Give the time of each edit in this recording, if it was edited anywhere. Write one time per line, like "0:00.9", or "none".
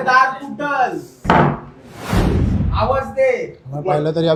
none